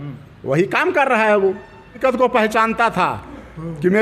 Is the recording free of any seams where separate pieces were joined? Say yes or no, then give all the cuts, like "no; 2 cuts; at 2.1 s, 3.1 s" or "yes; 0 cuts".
no; 1 cut; at 1.9 s